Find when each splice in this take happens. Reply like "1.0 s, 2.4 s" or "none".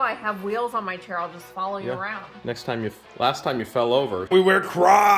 4.3 s